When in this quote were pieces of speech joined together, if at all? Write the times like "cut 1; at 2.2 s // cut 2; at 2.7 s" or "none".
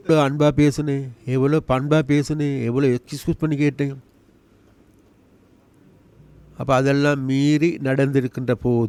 none

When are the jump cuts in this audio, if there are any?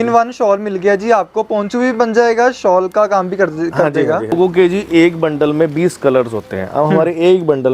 cut 1; at 4.3 s

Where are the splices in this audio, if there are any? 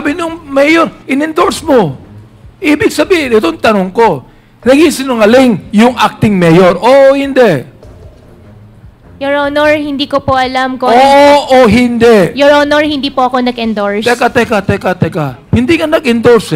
none

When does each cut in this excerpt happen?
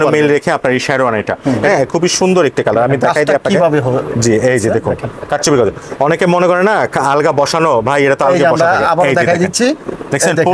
cut 1; at 1.7 s

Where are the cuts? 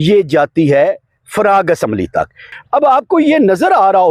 cut 1; at 2.4 s

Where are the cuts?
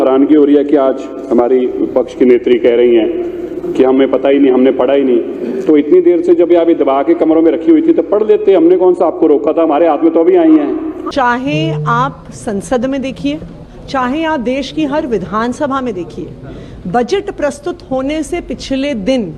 cut 1; at 11.0 s

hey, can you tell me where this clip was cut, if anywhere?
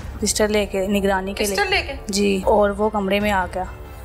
cut 1; at 2.4 s

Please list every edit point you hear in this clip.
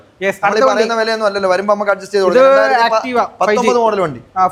none

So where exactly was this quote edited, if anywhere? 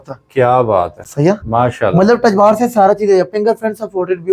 none

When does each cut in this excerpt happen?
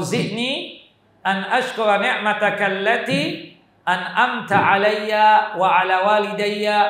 none

